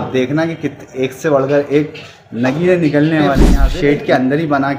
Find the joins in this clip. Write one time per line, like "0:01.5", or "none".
0:03.4